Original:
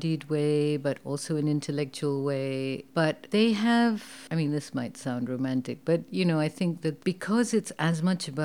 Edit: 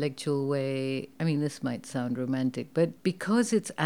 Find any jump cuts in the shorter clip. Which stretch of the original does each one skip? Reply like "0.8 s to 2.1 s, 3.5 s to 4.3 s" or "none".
2.8 s to 4.2 s, 6.1 s to 7.0 s